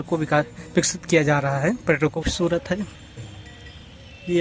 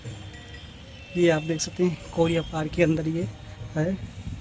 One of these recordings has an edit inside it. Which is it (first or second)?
first